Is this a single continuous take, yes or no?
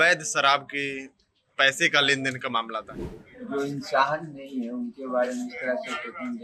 no